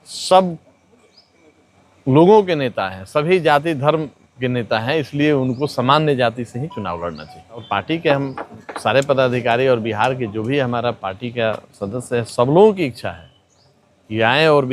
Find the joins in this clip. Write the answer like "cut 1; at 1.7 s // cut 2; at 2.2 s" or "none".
cut 1; at 7.6 s